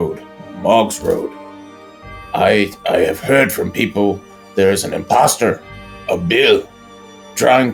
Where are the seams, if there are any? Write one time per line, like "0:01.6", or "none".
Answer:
none